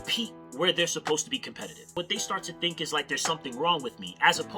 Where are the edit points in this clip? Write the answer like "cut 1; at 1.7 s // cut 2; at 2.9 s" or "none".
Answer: cut 1; at 2.0 s